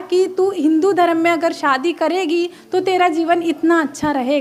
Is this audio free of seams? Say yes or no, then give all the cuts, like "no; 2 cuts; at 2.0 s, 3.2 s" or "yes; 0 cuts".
yes; 0 cuts